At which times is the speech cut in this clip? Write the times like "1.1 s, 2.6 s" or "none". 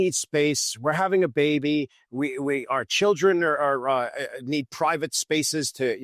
none

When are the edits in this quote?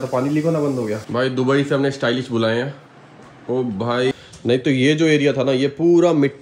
1.0 s, 4.1 s

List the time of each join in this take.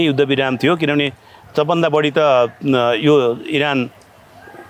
none

